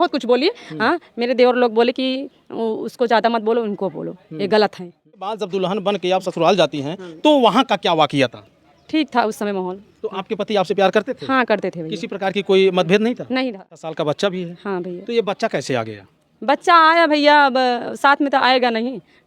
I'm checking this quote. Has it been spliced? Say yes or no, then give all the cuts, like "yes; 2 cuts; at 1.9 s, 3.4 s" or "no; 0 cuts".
yes; 2 cuts; at 5.3 s, 13.6 s